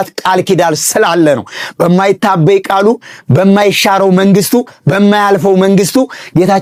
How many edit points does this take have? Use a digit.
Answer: 0